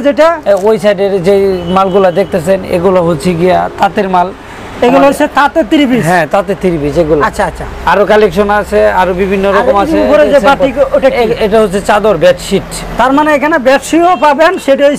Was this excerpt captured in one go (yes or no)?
yes